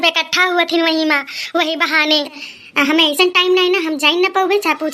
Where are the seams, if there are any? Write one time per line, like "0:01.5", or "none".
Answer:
0:02.5